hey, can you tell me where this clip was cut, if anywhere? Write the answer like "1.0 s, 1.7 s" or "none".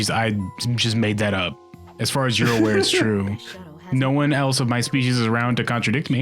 none